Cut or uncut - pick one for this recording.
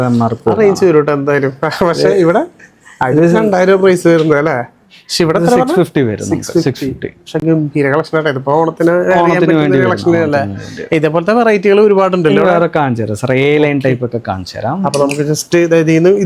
uncut